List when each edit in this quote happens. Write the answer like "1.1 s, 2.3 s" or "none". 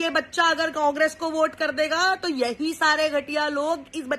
none